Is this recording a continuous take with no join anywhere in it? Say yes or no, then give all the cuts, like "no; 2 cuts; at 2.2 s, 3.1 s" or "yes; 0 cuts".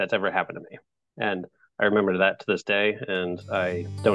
yes; 0 cuts